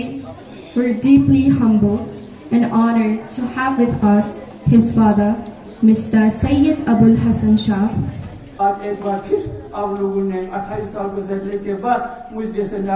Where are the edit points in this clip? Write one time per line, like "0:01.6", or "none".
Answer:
0:08.4